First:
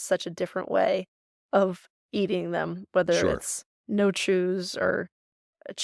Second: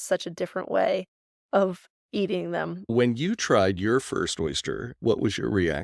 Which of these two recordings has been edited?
second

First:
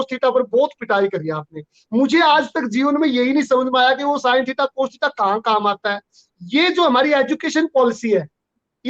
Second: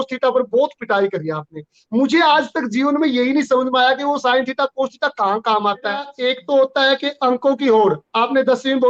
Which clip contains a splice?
second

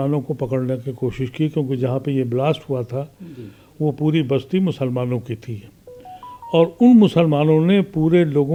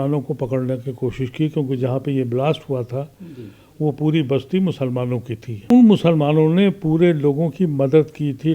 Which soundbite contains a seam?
second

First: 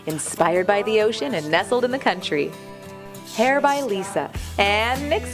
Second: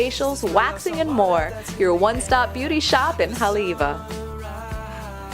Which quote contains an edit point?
second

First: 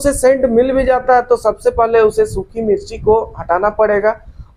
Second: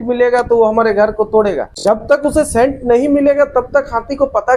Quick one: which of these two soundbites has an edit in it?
second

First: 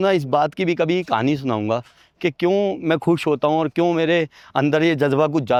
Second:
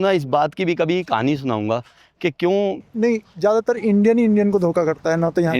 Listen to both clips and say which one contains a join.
second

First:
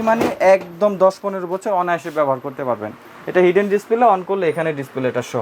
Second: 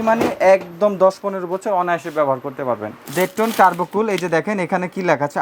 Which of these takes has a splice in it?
second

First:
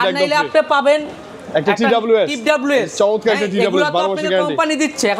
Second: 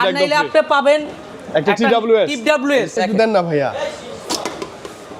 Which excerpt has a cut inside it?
second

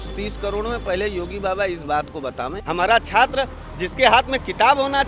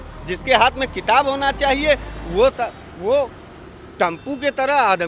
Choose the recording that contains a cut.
first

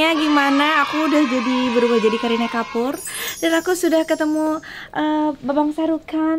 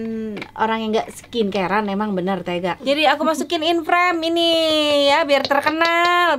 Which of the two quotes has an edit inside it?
second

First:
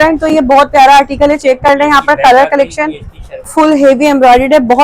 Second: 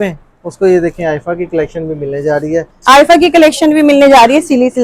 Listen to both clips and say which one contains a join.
first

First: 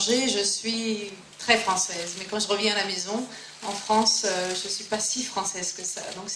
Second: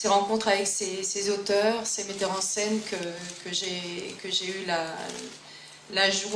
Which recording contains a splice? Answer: first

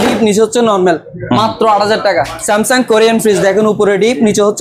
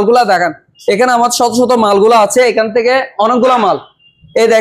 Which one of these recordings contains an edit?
first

